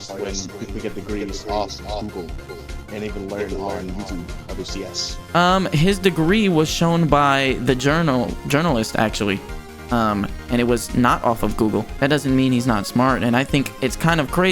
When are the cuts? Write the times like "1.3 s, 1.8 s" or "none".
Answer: 11.9 s